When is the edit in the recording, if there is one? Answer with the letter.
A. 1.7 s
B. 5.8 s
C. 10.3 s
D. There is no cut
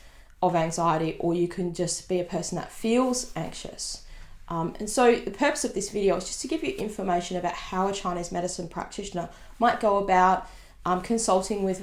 D